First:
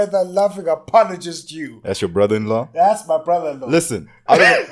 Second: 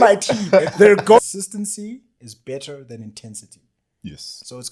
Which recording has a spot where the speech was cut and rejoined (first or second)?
second